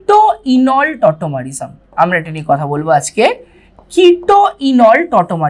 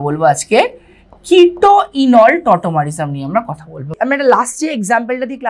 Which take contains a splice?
second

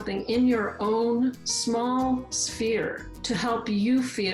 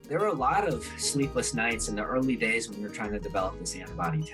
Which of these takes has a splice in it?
first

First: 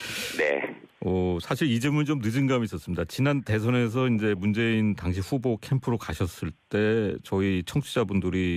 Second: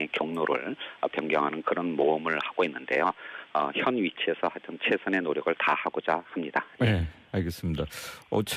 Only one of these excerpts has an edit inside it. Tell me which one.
second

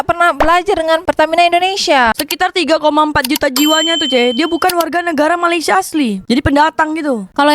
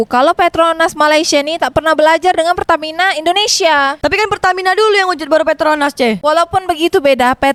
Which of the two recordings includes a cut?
first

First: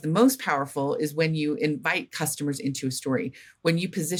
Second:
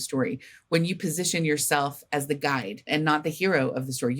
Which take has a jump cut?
second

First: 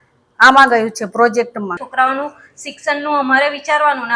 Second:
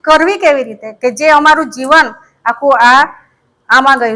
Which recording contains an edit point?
first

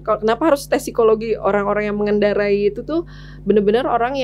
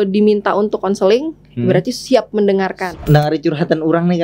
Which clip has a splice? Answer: second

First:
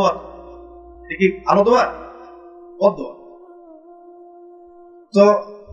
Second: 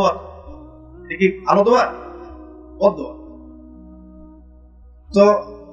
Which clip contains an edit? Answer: first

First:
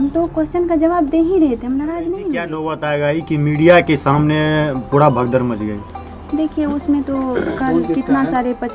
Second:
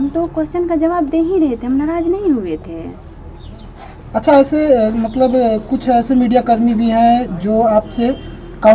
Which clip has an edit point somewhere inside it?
first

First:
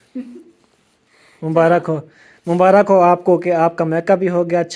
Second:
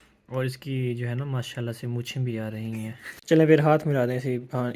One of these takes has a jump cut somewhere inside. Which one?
second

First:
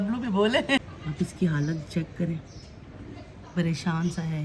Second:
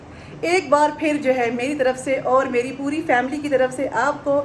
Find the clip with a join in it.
first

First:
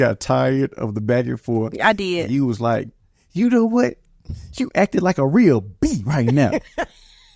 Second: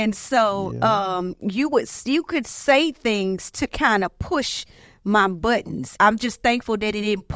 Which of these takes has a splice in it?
second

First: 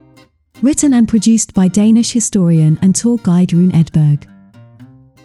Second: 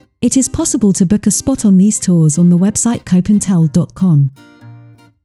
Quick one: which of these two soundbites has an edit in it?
second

